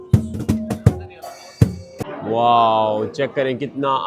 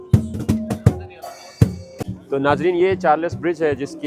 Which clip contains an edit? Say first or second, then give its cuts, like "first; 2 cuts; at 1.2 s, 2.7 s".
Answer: first; 1 cut; at 2.1 s